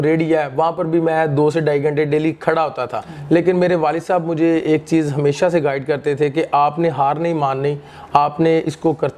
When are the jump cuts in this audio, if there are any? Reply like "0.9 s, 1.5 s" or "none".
none